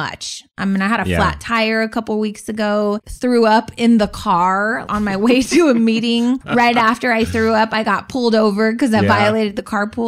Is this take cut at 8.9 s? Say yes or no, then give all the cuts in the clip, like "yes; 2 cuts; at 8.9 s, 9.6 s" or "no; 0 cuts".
no; 3 cuts; at 3.1 s, 4.8 s, 6.4 s